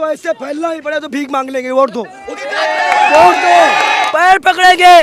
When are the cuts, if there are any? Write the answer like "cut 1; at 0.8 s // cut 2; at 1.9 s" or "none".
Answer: cut 1; at 4.0 s